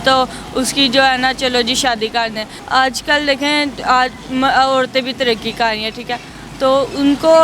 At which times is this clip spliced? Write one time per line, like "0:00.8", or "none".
0:02.5